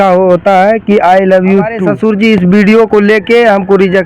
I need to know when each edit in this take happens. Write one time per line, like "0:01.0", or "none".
0:01.8